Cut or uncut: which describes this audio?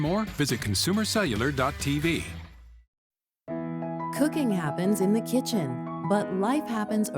cut